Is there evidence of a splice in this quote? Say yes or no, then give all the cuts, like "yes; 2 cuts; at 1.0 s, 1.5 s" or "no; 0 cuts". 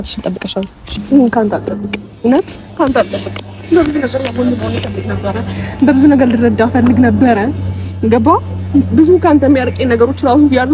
yes; 1 cut; at 1.0 s